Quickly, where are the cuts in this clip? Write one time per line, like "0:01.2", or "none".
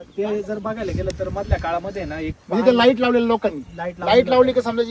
none